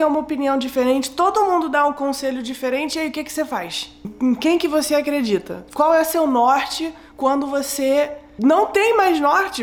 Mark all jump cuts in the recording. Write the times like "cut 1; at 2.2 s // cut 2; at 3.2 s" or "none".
none